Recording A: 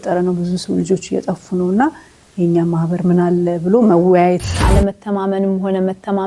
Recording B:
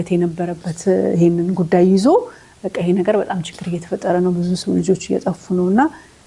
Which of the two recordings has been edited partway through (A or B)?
A